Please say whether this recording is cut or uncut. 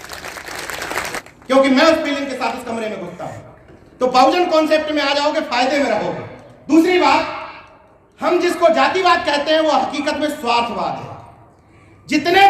cut